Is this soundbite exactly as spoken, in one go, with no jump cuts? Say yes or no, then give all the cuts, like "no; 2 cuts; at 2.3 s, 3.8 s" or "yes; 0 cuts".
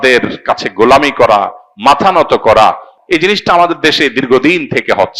no; 1 cut; at 2.9 s